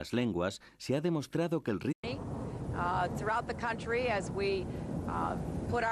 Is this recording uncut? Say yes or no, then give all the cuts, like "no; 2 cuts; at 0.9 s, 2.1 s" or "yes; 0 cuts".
yes; 0 cuts